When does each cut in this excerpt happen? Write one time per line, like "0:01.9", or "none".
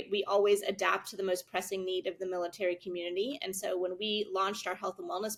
none

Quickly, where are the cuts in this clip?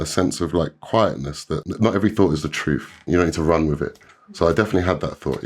0:03.1

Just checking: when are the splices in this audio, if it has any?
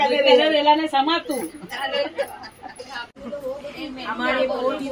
0:03.2

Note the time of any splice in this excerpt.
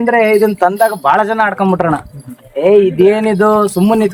none

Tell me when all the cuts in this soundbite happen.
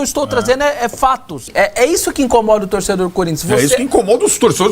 0:01.4

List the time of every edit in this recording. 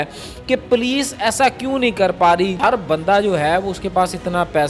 0:02.6

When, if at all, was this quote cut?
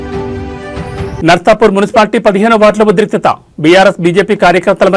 0:01.2

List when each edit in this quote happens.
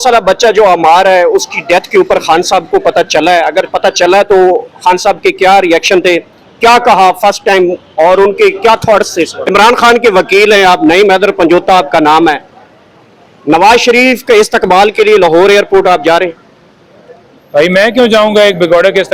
0:09.4

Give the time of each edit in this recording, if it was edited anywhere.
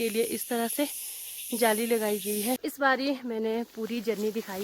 0:02.6

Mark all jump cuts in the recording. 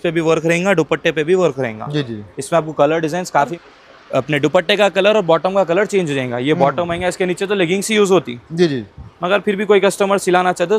0:03.6

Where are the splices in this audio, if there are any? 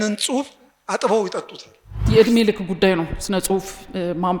0:02.1

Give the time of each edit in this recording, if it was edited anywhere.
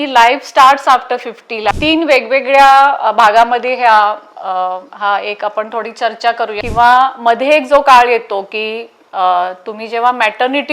0:01.7
0:06.6

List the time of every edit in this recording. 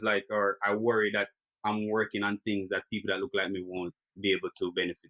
0:04.0

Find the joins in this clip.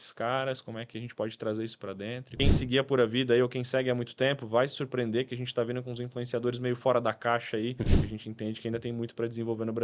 0:02.2
0:07.9

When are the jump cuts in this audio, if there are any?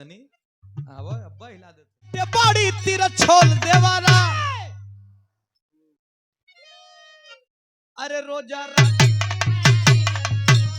0:02.3

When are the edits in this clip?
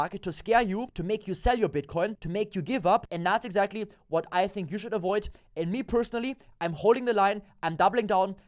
0:00.9
0:02.2
0:03.1

